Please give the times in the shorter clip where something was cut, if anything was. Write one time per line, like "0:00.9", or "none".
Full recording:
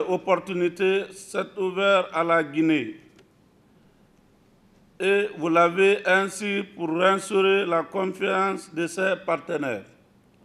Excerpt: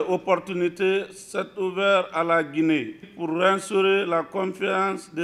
0:03.1